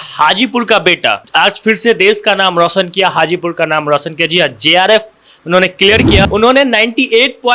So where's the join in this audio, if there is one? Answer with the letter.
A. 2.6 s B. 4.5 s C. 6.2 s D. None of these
C